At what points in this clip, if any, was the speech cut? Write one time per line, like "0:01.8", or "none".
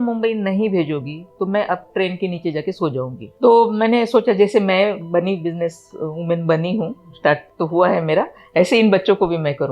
0:03.2